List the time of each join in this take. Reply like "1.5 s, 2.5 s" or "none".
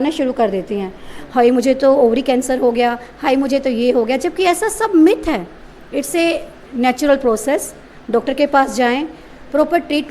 none